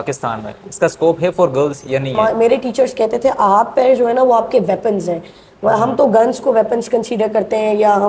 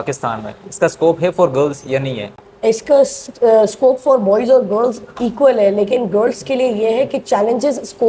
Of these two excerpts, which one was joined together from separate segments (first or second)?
first